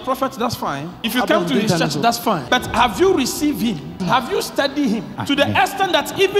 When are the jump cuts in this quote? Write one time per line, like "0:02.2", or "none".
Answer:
0:01.0
0:02.5
0:04.0
0:05.1

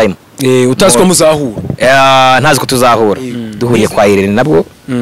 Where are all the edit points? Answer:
0:03.5

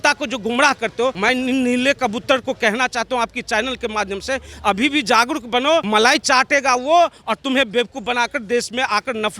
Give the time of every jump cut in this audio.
0:01.2
0:05.9

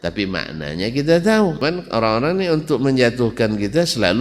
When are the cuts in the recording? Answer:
0:01.6

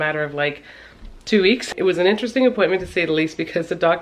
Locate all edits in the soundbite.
0:01.7

